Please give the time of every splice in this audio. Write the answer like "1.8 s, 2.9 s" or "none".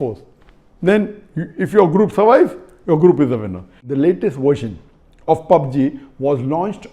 3.8 s